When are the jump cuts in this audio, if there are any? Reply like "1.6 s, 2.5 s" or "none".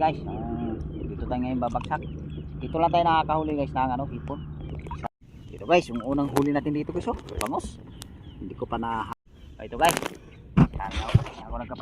5.1 s, 9.1 s